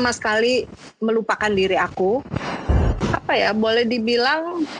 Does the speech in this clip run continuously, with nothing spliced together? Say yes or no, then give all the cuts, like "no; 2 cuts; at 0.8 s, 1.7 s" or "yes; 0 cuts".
no; 1 cut; at 3.0 s